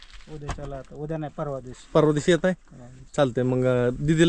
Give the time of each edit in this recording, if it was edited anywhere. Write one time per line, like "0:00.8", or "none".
none